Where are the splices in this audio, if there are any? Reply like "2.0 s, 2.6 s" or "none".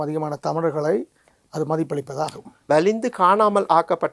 2.5 s